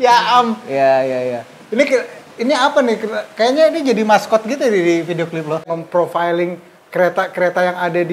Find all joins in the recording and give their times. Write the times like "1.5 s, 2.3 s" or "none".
5.7 s